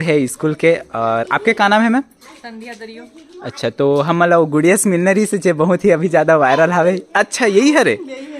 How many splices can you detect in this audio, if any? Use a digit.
0